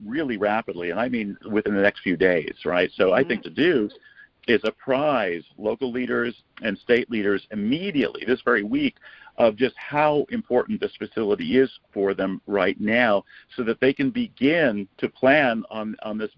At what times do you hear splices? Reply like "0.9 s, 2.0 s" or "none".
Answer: 14.9 s